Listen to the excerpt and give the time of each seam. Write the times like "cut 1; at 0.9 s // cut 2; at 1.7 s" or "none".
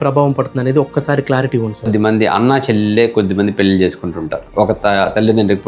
cut 1; at 1.9 s

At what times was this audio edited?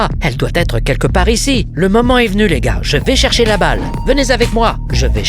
none

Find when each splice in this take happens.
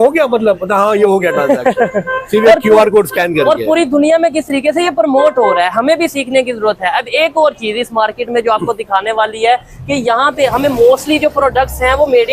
none

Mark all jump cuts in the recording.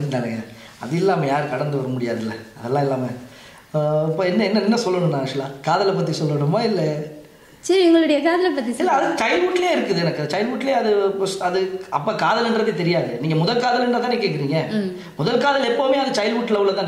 none

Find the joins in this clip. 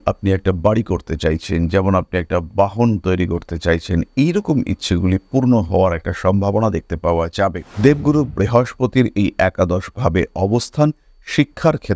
cut 1; at 7.7 s

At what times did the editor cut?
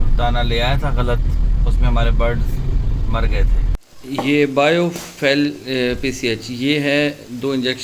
cut 1; at 3.7 s

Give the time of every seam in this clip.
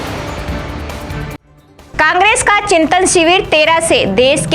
cut 1; at 1.5 s

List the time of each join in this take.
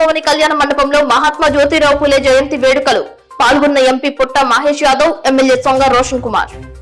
none

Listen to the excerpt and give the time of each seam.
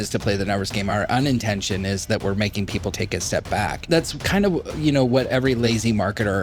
cut 1; at 0.9 s // cut 2; at 2.9 s // cut 3; at 3.9 s // cut 4; at 5.4 s

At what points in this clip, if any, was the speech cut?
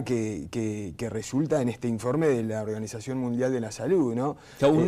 cut 1; at 1.2 s

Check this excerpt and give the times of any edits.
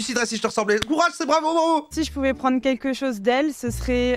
cut 1; at 1.9 s

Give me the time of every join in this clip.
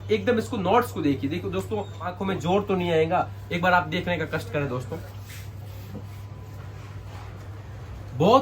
cut 1; at 2.2 s

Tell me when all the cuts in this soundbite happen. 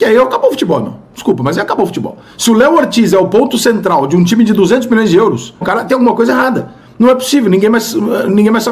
cut 1; at 5.6 s

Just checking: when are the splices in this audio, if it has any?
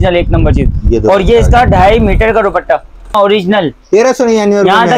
cut 1; at 3.2 s

